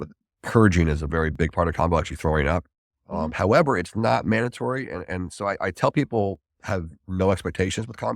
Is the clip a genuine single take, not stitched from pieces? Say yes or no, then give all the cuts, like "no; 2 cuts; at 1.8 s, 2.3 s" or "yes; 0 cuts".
yes; 0 cuts